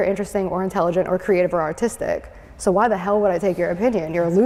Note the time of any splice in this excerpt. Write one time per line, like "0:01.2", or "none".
none